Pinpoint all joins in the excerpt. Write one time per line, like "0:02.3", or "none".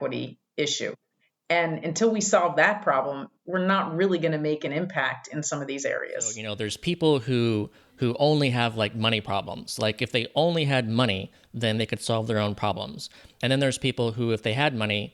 0:06.5